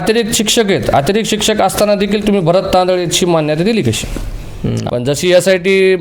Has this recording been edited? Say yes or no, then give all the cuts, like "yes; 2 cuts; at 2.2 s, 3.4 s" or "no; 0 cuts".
yes; 1 cut; at 4.7 s